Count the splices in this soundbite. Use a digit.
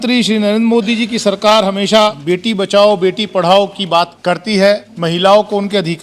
3